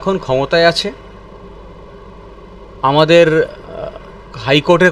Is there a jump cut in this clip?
no; 0 cuts

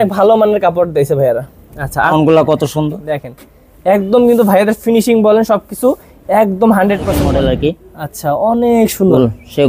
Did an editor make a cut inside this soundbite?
yes; 2 cuts; at 2.1 s, 7.2 s

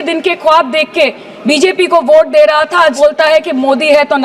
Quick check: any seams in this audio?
yes; 1 cut; at 3.0 s

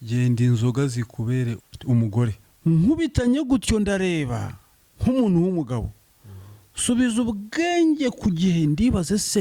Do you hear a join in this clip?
yes; 2 cuts; at 1.6 s, 2.4 s

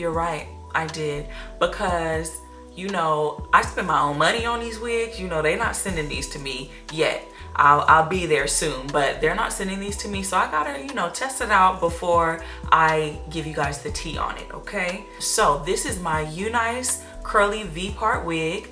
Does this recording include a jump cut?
yes; 1 cut; at 15.2 s

